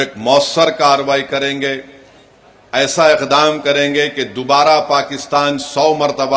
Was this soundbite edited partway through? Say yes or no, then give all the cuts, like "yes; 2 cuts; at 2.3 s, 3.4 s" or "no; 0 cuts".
no; 0 cuts